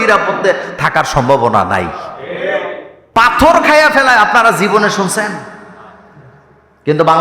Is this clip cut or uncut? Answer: uncut